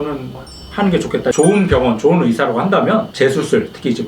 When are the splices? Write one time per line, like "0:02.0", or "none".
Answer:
0:01.3
0:03.1